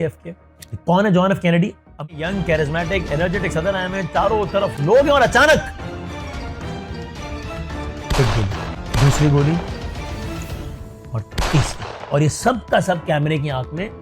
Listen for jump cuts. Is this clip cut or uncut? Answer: cut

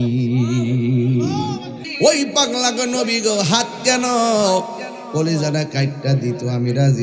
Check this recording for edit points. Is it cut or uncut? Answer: cut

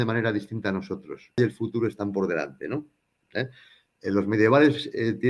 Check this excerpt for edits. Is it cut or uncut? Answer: cut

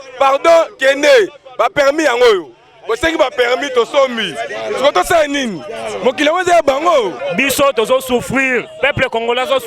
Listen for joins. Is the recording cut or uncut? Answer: cut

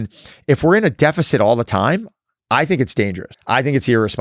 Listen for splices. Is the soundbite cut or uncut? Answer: cut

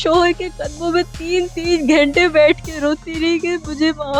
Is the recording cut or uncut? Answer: uncut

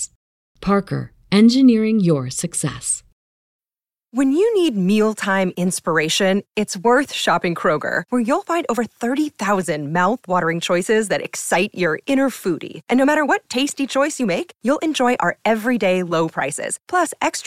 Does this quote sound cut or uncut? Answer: cut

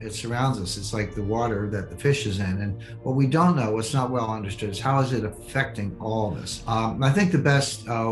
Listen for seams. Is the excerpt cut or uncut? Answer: cut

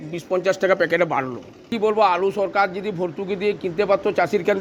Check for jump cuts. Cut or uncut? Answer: cut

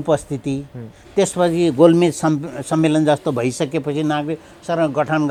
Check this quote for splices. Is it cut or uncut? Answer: uncut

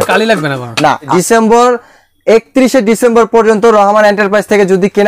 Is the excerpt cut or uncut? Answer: cut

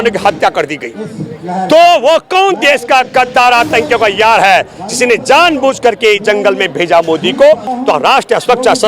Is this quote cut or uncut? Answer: cut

